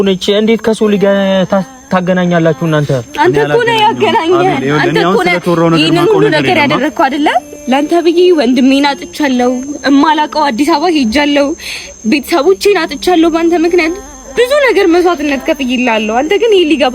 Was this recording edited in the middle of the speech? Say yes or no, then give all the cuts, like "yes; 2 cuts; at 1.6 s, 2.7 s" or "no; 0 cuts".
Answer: yes; 1 cut; at 7.5 s